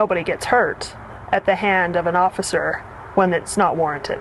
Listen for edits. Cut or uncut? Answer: uncut